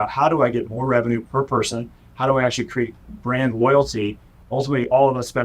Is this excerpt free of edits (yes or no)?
no